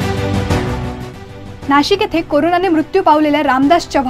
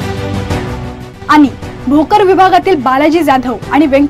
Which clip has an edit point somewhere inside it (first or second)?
first